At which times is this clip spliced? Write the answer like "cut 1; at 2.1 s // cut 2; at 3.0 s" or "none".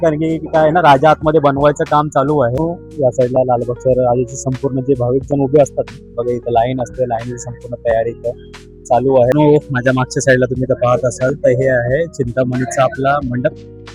cut 1; at 2.5 s // cut 2; at 9.3 s